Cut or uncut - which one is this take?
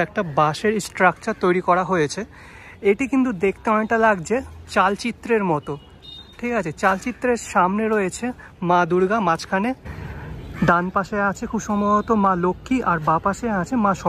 uncut